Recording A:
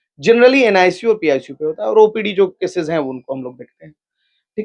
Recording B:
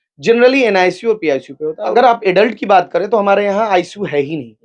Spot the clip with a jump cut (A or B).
B